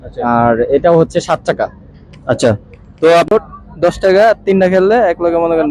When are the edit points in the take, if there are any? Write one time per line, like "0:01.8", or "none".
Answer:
0:03.3